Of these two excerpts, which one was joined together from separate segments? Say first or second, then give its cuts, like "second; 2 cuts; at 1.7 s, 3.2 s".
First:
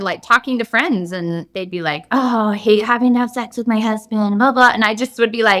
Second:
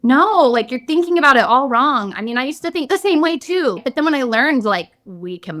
second; 1 cut; at 3.8 s